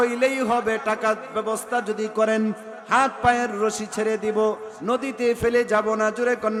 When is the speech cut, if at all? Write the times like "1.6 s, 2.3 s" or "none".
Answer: none